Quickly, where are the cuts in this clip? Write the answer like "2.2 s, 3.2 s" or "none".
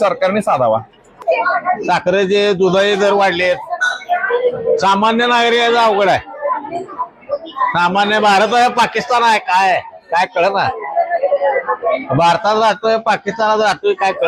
1.2 s